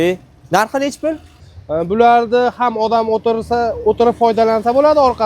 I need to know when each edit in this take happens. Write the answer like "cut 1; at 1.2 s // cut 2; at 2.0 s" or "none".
cut 1; at 1.4 s